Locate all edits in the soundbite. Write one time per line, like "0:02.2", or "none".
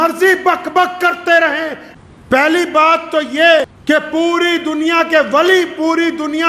0:01.8
0:03.6